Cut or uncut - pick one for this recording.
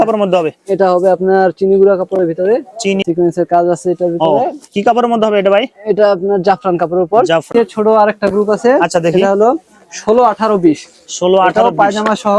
cut